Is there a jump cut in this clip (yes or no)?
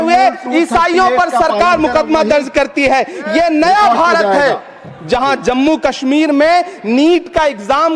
no